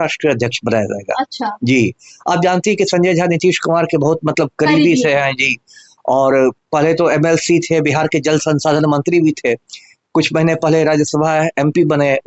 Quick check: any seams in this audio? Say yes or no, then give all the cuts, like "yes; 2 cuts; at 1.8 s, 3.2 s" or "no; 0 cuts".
no; 0 cuts